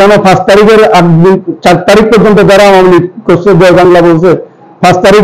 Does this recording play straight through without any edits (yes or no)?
yes